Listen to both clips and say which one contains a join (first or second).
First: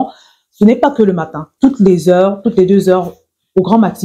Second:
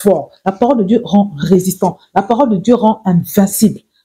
first